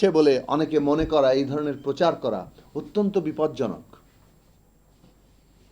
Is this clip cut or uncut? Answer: uncut